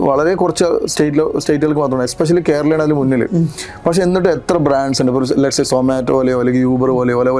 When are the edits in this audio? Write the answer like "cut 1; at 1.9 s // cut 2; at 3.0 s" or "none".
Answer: none